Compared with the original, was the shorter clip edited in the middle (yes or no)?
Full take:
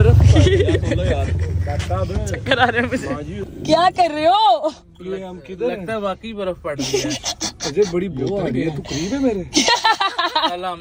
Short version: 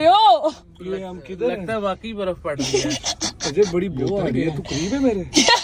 no